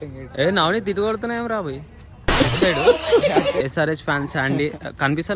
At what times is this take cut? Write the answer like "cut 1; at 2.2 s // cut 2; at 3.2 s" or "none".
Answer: cut 1; at 3.6 s